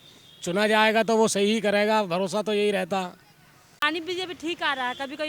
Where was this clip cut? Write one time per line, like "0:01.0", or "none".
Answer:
none